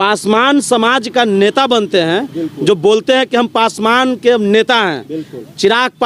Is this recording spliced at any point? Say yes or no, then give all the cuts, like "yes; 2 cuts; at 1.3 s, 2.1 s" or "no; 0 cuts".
no; 0 cuts